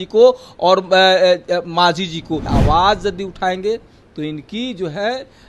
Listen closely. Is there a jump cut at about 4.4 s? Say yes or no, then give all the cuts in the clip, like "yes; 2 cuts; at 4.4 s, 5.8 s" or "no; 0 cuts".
no; 1 cut; at 2.5 s